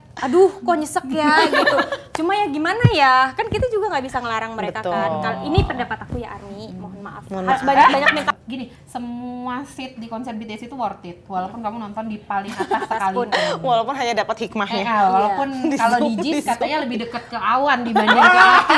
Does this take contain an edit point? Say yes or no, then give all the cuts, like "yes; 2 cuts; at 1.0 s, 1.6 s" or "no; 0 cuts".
yes; 1 cut; at 8.2 s